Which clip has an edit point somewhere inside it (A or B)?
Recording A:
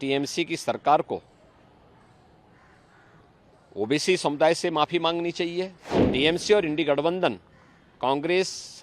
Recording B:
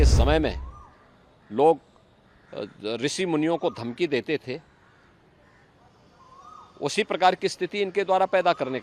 A